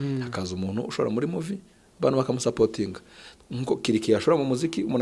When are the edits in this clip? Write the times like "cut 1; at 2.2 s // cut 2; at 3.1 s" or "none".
none

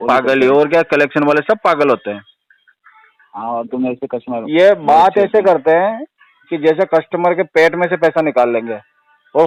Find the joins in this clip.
none

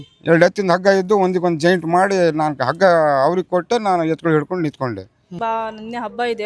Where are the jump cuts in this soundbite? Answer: cut 1; at 5.3 s

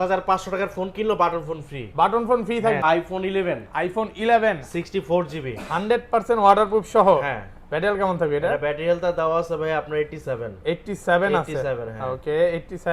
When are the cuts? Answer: cut 1; at 2.8 s

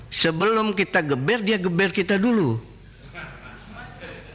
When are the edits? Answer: none

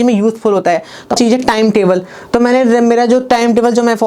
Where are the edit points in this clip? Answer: cut 1; at 1.2 s

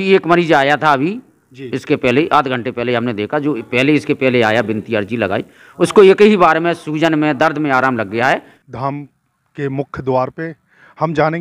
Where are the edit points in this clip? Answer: cut 1; at 8.6 s

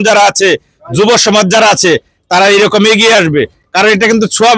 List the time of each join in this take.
none

